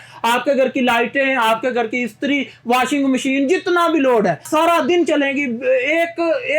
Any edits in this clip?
yes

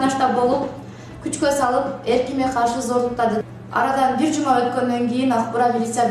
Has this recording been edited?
yes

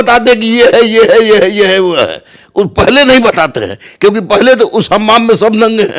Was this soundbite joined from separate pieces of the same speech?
no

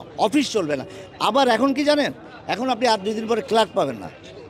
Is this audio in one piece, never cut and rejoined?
yes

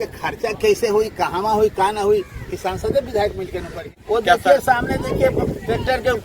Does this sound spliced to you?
yes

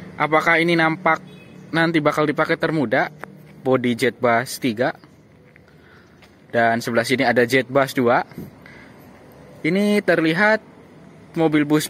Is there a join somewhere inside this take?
no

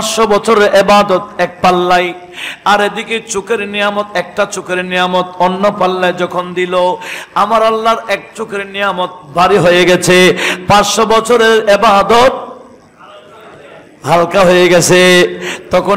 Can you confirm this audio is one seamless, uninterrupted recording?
yes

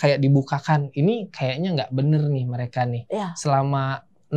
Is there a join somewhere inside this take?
no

